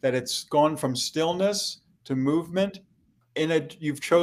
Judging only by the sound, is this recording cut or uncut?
uncut